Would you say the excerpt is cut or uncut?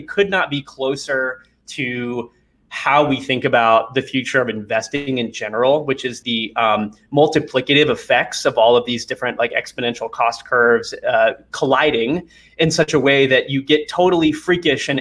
uncut